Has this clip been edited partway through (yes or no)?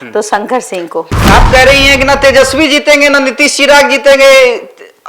no